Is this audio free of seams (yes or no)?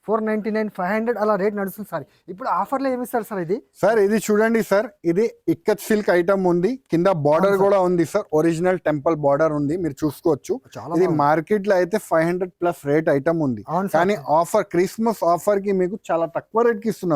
yes